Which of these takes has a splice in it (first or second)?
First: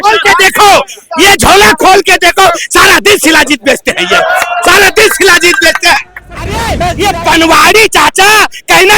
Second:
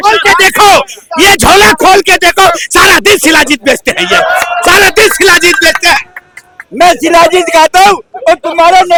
first